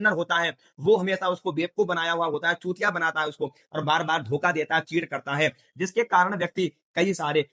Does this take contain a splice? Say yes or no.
no